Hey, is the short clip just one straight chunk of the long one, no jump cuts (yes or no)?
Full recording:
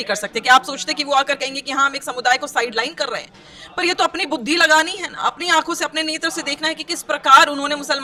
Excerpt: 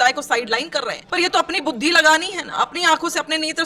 no